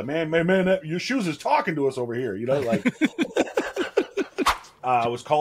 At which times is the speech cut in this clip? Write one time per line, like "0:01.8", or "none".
0:04.5